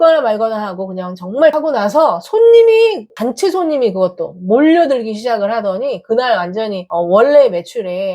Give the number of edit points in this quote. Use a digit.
3